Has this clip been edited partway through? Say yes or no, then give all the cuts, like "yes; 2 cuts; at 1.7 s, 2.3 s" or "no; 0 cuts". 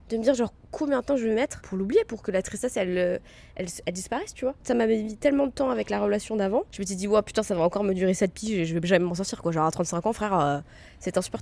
yes; 3 cuts; at 1.7 s, 4.6 s, 6.8 s